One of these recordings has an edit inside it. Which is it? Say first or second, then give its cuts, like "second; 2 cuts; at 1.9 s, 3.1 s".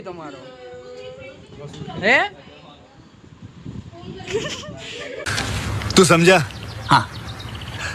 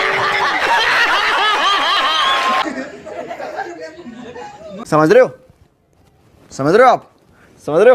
second; 1 cut; at 2.6 s